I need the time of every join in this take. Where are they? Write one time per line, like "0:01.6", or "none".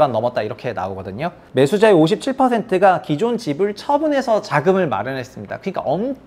0:01.4